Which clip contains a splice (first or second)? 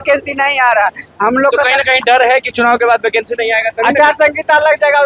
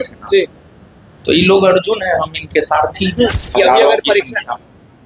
second